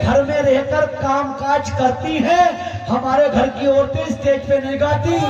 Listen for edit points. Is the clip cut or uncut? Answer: uncut